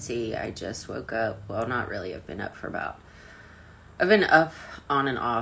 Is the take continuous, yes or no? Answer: yes